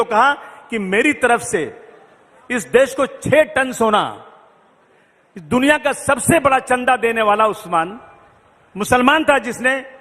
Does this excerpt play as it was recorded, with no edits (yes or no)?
yes